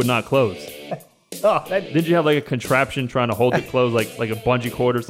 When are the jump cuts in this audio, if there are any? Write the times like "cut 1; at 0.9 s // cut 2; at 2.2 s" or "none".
cut 1; at 1.9 s